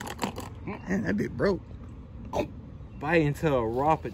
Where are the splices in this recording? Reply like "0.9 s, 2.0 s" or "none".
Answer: none